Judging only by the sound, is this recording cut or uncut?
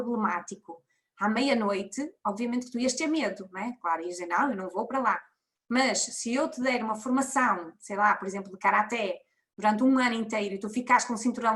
uncut